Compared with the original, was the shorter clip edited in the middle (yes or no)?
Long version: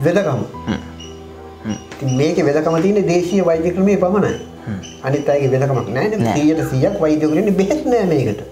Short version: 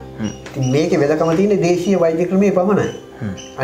no